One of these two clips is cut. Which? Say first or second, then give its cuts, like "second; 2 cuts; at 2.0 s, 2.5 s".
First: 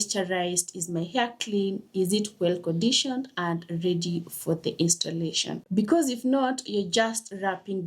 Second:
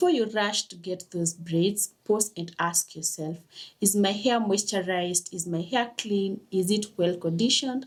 first; 1 cut; at 5.6 s